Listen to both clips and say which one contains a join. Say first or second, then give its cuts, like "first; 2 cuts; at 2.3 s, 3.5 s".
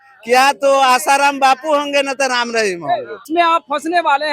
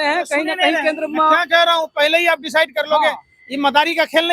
first; 1 cut; at 3.2 s